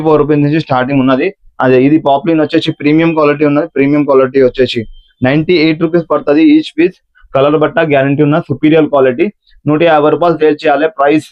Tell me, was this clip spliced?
no; 0 cuts

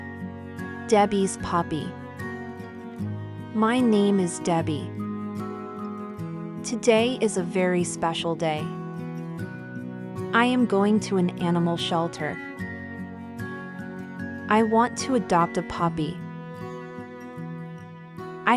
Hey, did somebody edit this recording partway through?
no; 0 cuts

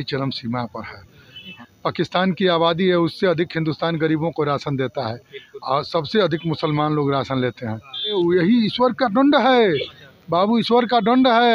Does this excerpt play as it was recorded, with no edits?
no; 2 cuts; at 1.6 s, 8.1 s

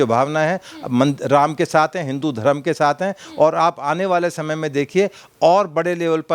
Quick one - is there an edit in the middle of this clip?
no; 0 cuts

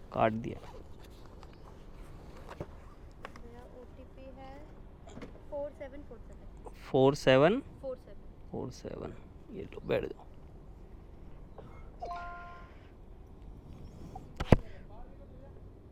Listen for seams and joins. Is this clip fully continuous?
yes; 0 cuts

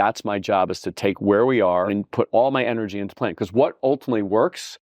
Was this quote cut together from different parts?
yes; 2 cuts; at 1.9 s, 3.8 s

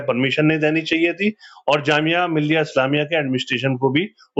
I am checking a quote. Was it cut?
no; 0 cuts

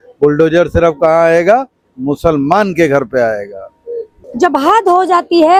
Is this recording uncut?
yes; 0 cuts

